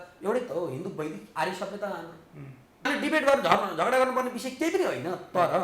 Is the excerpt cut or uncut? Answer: cut